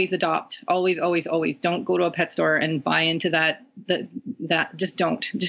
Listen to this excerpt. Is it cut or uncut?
uncut